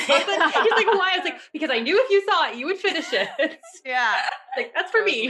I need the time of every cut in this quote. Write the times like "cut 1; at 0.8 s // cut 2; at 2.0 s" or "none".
none